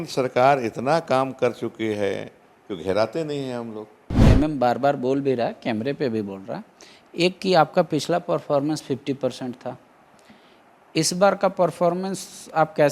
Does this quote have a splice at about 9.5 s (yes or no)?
no